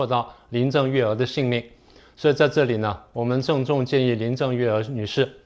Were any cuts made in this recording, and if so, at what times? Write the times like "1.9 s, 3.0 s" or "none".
none